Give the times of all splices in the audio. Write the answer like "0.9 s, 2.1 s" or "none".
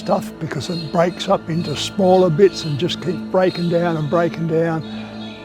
none